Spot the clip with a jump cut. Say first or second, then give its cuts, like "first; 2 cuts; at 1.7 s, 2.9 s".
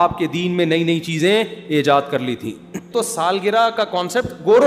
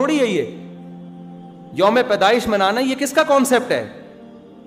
first; 1 cut; at 2.9 s